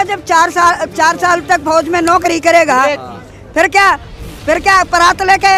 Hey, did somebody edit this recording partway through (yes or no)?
no